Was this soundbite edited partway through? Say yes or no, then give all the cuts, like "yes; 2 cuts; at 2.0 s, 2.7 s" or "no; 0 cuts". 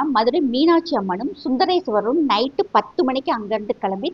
no; 0 cuts